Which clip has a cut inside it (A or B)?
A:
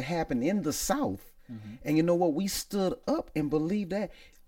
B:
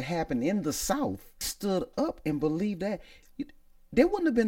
B